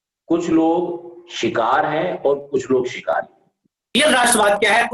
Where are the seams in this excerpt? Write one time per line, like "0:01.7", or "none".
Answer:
0:03.9

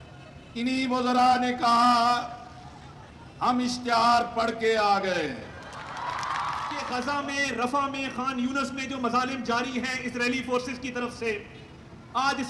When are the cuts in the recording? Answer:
0:06.8

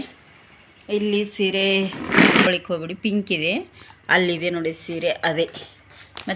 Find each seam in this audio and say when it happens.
0:02.5

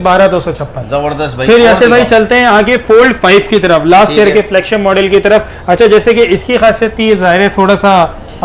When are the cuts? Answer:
none

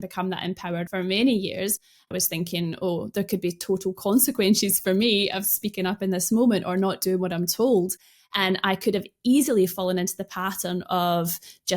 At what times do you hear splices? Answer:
0:02.1

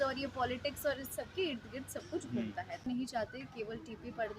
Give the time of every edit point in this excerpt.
0:02.8

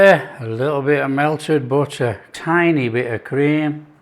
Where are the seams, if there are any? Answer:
0:02.3

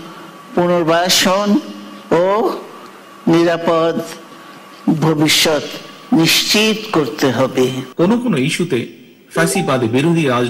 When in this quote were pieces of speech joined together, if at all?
0:07.8

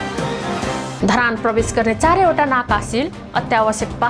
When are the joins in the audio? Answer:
0:00.9

